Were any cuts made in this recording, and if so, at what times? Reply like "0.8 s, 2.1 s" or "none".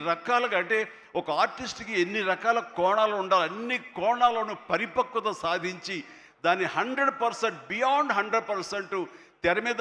none